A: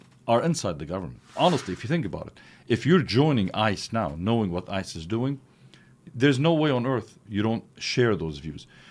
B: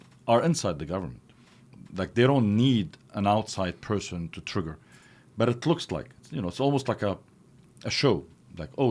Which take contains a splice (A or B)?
A